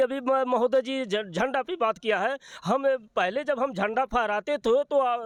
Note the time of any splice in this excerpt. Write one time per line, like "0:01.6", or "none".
none